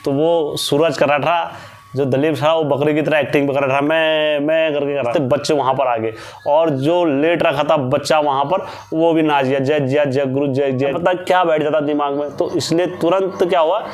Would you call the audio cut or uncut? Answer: cut